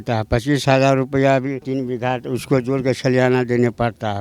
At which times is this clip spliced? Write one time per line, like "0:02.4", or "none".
0:01.6